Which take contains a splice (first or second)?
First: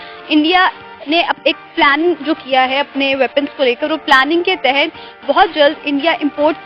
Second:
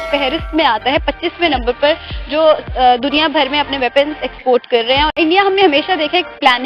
second